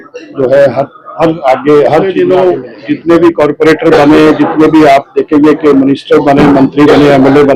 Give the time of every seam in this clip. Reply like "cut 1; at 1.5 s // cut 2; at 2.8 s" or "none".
cut 1; at 2.2 s